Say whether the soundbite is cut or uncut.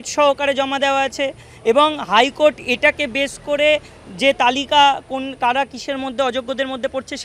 uncut